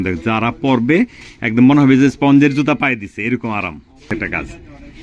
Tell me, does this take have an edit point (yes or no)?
yes